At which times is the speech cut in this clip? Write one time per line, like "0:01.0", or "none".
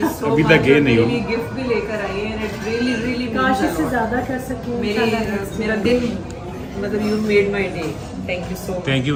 none